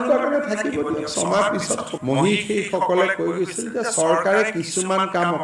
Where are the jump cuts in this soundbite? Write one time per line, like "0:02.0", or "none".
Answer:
0:01.9